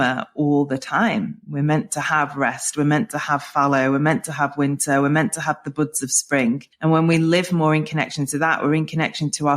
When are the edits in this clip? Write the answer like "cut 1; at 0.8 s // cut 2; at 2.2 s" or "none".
cut 1; at 6.7 s